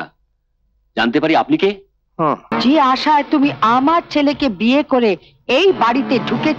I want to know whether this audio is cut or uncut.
cut